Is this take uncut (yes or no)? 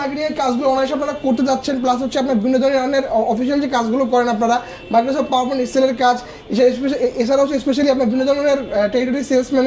yes